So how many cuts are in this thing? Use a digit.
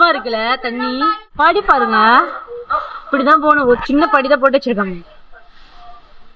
1